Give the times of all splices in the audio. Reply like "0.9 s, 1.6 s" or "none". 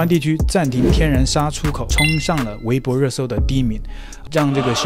1.9 s

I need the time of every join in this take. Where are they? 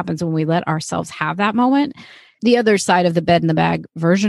2.3 s

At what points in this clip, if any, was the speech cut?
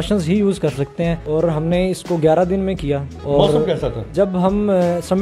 1.2 s, 3.1 s, 4.0 s

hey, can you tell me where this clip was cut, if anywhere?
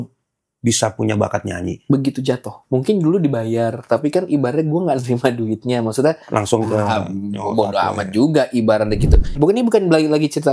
1.7 s, 2.5 s, 9.4 s

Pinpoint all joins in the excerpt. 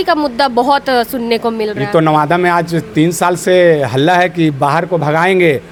none

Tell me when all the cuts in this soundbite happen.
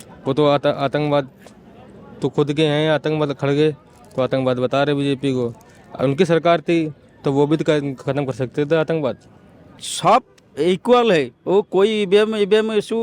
9.8 s

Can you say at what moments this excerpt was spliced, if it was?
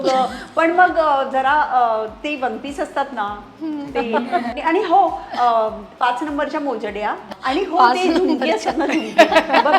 4.5 s, 7.2 s

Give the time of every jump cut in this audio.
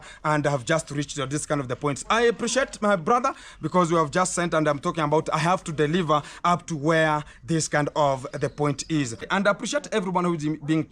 9.2 s

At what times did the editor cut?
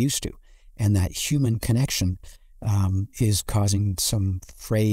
none

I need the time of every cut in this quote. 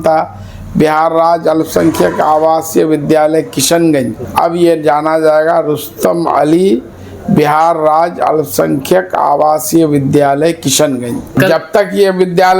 4.2 s, 11.3 s

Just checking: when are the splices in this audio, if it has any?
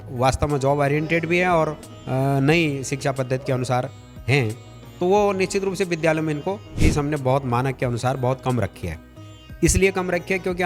6.7 s

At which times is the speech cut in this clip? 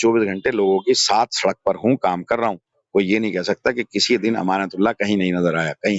none

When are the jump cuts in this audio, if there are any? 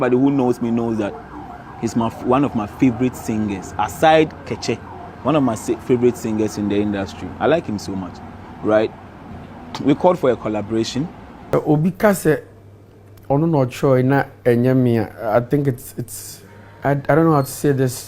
11.5 s

